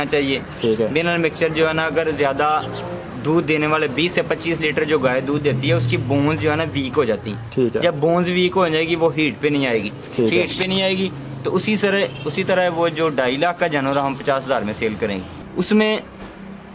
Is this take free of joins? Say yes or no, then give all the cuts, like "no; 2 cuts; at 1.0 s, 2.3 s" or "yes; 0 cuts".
no; 1 cut; at 15.4 s